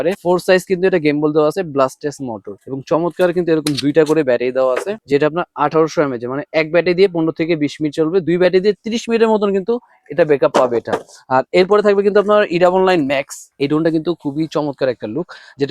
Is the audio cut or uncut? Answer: uncut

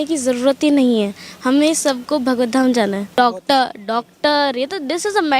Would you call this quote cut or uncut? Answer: cut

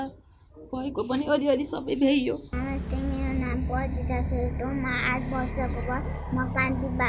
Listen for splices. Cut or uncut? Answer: cut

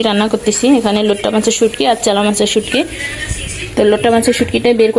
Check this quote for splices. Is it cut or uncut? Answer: uncut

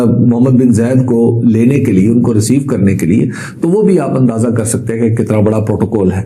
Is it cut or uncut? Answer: uncut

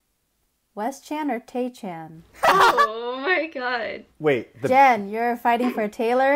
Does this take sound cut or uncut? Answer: uncut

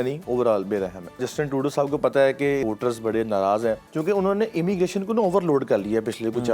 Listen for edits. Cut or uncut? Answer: cut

